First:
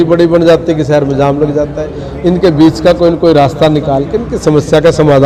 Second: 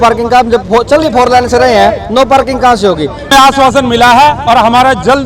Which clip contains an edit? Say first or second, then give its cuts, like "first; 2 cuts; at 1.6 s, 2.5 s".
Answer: second; 1 cut; at 3.3 s